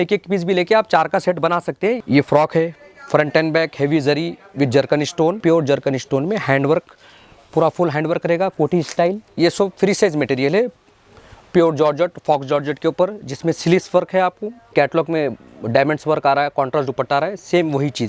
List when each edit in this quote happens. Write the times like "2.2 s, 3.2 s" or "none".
2.0 s, 5.4 s, 9.2 s, 14.7 s